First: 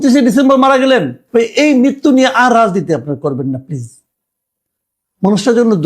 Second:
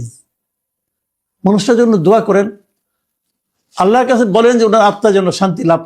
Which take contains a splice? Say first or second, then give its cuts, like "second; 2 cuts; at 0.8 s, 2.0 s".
first; 1 cut; at 1.2 s